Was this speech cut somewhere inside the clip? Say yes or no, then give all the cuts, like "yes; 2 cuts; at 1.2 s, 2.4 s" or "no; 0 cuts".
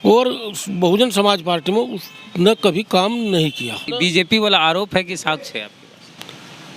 yes; 1 cut; at 3.9 s